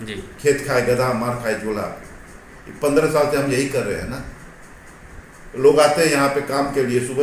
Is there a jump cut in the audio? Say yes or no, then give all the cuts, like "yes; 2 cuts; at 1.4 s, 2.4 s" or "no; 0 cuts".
no; 0 cuts